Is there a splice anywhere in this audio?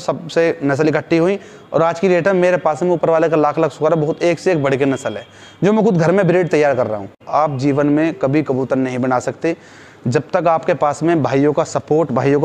yes; 1 cut; at 7.2 s

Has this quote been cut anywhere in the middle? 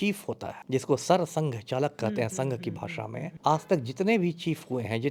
no; 0 cuts

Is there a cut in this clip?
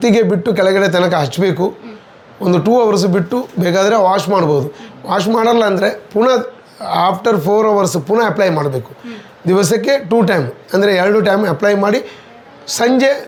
no; 0 cuts

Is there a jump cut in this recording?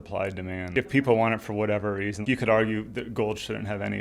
yes; 2 cuts; at 0.7 s, 2.2 s

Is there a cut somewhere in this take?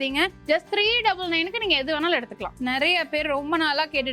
yes; 1 cut; at 2.5 s

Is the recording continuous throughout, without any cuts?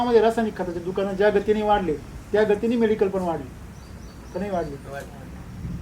yes; 0 cuts

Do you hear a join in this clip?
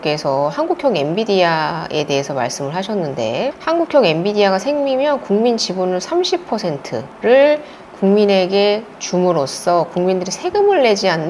no; 0 cuts

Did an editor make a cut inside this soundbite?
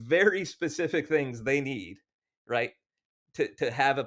no; 0 cuts

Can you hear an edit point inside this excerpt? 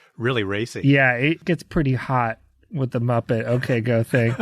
yes; 1 cut; at 1.4 s

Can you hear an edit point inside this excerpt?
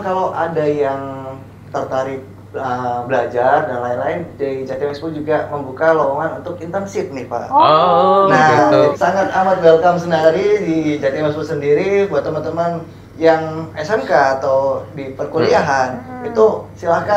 yes; 1 cut; at 8.9 s

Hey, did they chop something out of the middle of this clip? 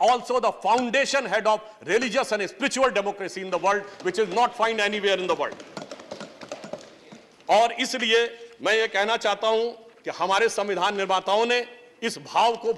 no; 0 cuts

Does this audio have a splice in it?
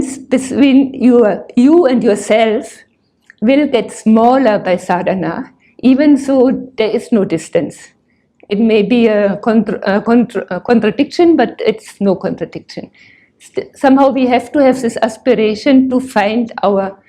no; 0 cuts

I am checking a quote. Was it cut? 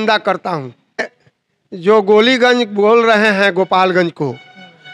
yes; 1 cut; at 1.2 s

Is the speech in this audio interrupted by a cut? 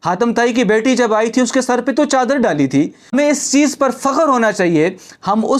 yes; 1 cut; at 3.0 s

